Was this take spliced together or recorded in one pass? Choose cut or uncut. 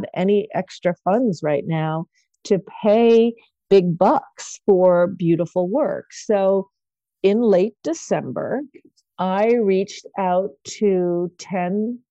uncut